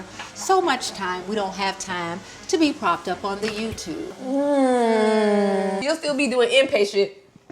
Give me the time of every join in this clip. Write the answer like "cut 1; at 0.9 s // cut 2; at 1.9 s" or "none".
cut 1; at 4.1 s // cut 2; at 5.8 s